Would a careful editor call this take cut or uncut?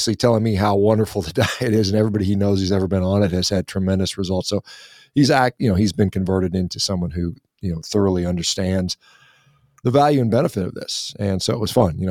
uncut